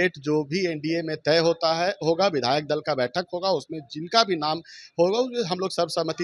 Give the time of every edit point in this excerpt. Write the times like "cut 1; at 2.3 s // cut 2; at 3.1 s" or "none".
none